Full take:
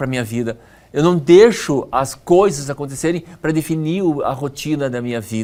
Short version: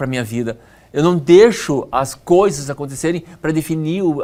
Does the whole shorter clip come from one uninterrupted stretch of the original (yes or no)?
yes